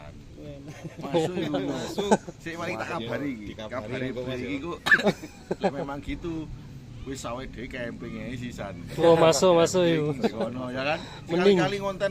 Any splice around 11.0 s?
no; 0 cuts

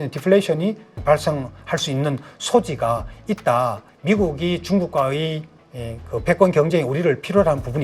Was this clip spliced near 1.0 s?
yes; 2 cuts; at 1.0 s, 3.8 s

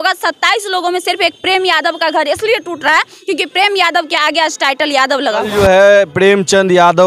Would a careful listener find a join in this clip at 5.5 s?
yes; 1 cut; at 5.5 s

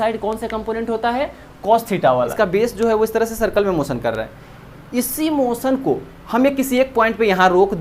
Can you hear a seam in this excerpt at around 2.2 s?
yes; 1 cut; at 2.2 s

